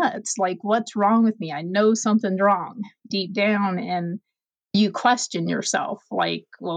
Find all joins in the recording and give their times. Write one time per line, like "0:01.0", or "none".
0:03.1
0:04.8